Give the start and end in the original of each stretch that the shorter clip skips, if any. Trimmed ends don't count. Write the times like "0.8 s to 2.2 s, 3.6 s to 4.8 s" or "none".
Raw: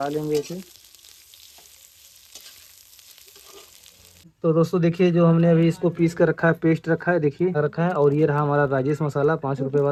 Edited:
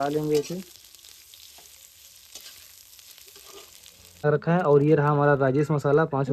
4.2 s to 7.5 s